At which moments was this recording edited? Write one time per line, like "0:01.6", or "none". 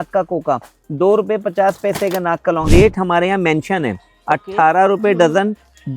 0:02.7